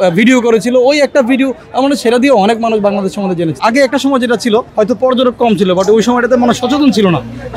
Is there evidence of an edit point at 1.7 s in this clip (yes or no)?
no